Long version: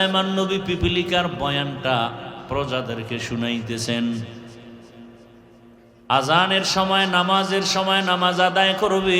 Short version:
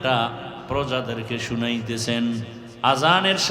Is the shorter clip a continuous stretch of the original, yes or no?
no